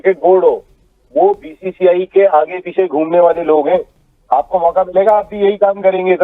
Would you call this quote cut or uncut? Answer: uncut